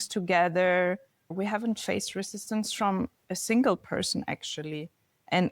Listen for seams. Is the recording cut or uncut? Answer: cut